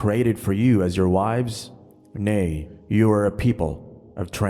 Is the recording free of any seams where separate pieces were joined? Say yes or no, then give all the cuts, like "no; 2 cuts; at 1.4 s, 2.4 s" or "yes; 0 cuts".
yes; 0 cuts